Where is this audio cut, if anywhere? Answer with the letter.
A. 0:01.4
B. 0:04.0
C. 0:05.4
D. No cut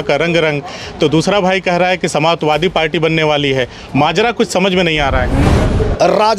C